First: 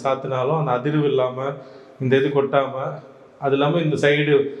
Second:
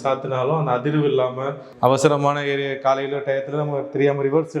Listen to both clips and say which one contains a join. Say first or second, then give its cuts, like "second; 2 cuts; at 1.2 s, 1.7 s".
second; 1 cut; at 1.6 s